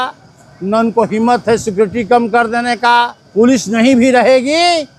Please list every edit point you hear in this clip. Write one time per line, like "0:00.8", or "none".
0:03.2